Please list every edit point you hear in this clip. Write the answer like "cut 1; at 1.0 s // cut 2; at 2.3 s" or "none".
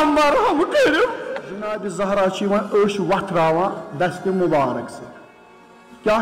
cut 1; at 1.7 s